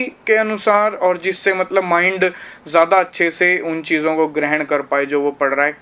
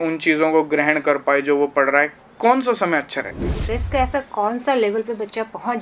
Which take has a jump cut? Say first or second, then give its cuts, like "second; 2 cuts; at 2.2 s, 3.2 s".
second; 1 cut; at 3.6 s